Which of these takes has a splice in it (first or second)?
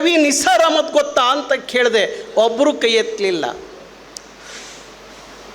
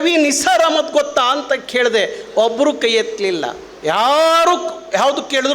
second